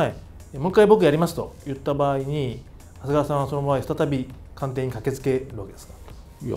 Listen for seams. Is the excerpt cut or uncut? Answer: cut